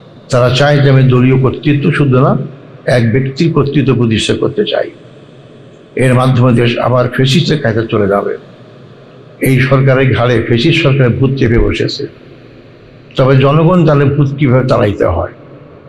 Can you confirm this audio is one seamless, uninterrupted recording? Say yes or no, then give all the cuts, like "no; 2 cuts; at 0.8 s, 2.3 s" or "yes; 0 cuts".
yes; 0 cuts